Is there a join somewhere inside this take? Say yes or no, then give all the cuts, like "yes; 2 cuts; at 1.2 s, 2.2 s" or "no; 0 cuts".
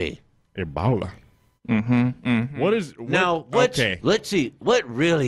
no; 0 cuts